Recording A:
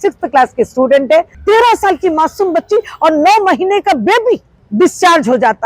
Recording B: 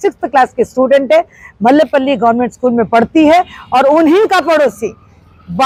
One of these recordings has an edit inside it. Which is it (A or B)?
A